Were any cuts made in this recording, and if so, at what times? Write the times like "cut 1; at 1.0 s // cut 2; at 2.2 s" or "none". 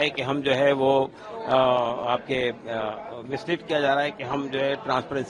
none